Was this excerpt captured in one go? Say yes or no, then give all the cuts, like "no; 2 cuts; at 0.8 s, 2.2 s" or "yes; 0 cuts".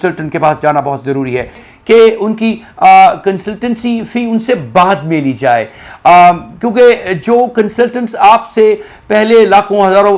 no; 1 cut; at 1.7 s